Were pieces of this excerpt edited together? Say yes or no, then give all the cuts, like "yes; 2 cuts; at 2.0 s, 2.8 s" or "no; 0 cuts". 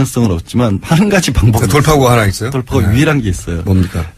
no; 0 cuts